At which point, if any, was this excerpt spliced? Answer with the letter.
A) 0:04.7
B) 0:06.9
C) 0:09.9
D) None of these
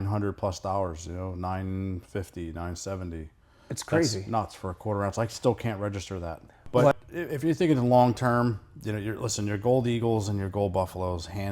B